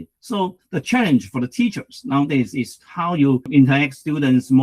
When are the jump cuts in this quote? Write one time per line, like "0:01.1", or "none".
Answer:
0:03.5

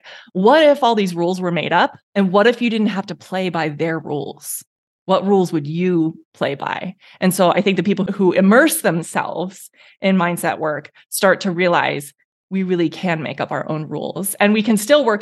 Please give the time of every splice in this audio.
0:02.0
0:08.0

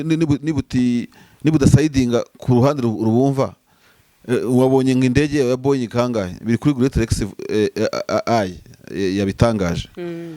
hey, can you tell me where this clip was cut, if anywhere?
none

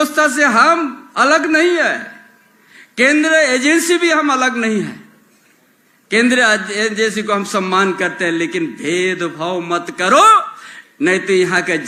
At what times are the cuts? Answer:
none

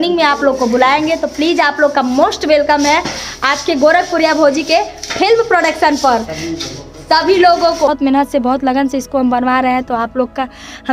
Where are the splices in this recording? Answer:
0:07.9

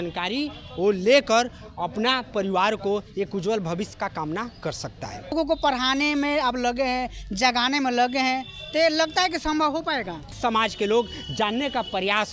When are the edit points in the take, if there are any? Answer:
0:05.3
0:10.3

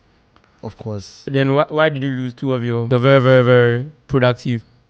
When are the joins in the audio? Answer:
0:01.2
0:02.8

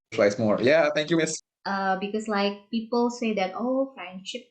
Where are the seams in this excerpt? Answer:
0:01.3

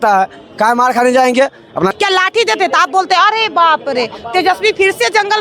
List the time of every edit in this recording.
0:01.9

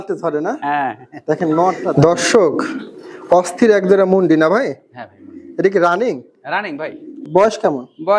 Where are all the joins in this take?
0:01.9
0:07.2

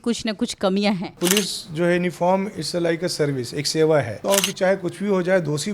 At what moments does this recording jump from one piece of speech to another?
0:01.1
0:04.2

